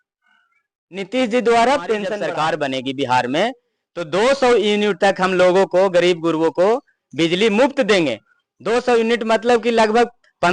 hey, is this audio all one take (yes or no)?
no